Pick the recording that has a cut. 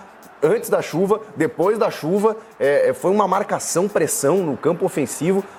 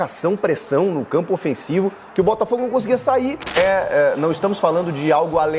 second; 1 cut; at 3.6 s

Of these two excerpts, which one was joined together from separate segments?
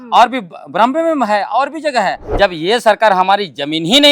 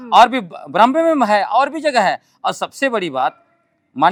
first; 1 cut; at 2.2 s

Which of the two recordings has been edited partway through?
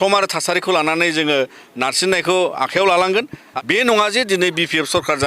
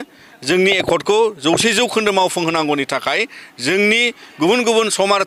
first; 1 cut; at 3.5 s

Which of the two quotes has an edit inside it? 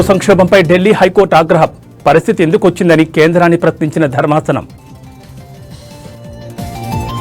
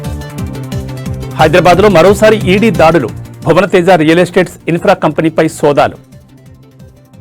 second; 1 cut; at 1.3 s

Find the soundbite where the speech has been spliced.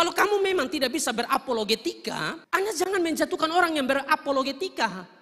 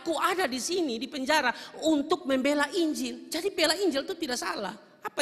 first; 1 cut; at 2.4 s

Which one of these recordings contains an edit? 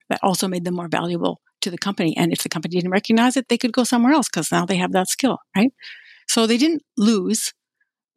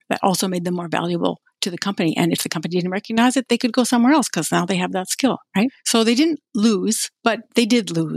second; 2 cuts; at 5.8 s, 7.1 s

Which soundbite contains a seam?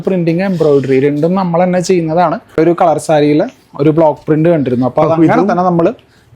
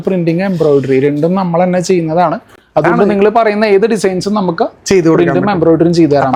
first; 1 cut; at 2.6 s

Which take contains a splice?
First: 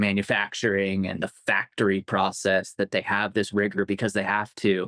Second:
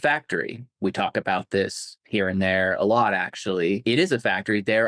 second; 1 cut; at 3.8 s

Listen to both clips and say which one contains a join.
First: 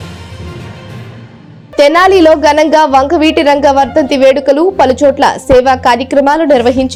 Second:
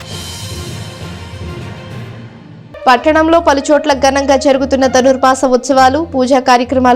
second; 1 cut; at 2.7 s

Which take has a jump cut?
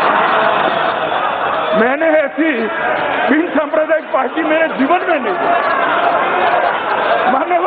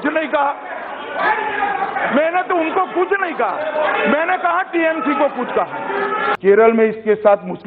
second; 1 cut; at 6.3 s

